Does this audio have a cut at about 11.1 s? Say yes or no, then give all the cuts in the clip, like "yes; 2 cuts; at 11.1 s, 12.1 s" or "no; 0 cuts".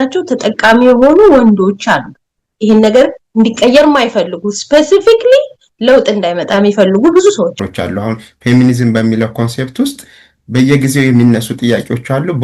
no; 1 cut; at 7.6 s